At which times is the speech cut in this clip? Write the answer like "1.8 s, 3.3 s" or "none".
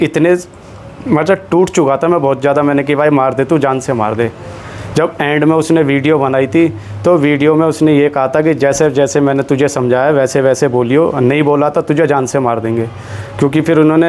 none